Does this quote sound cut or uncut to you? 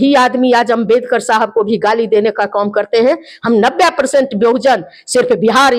uncut